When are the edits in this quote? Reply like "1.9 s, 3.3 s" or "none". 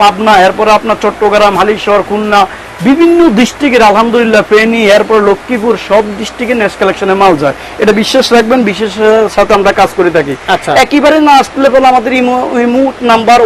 none